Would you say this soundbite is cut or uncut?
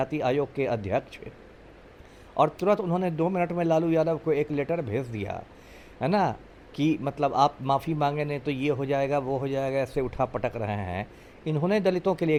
uncut